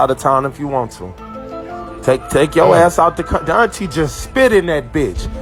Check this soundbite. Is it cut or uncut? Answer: uncut